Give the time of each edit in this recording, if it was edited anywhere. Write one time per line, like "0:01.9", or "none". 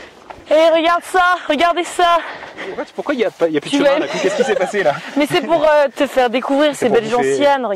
0:02.9